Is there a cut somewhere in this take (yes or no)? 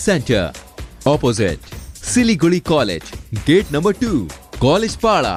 no